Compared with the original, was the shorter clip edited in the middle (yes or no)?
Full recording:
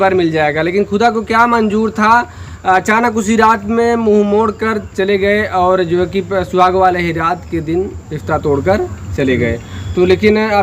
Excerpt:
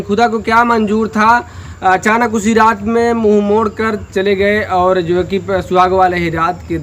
no